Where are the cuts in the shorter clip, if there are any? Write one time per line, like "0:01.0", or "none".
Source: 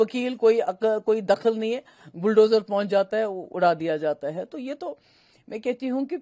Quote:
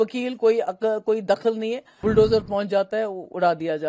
0:01.9